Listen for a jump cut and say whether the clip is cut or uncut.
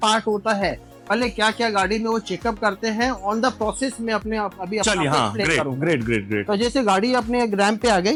uncut